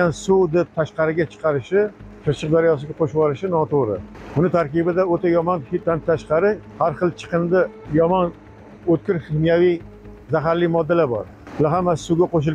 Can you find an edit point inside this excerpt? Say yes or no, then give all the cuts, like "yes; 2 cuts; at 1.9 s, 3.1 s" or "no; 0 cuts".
yes; 6 cuts; at 2.1 s, 4.1 s, 5.8 s, 6.7 s, 7.8 s, 11.4 s